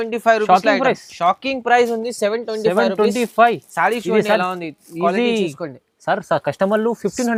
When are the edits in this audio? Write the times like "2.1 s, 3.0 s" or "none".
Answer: none

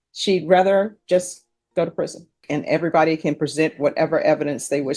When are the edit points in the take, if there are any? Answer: 2.4 s

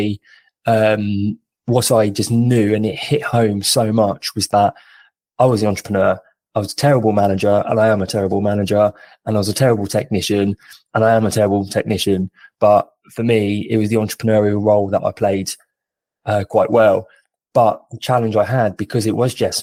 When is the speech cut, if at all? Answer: none

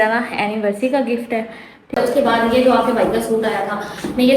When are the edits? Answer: 2.0 s

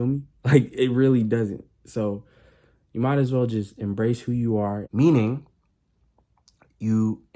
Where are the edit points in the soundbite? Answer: 4.8 s

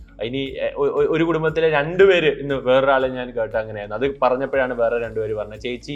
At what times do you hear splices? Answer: none

